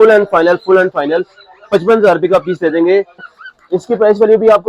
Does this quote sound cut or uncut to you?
cut